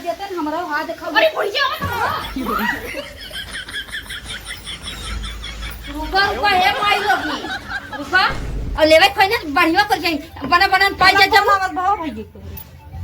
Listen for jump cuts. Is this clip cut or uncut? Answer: cut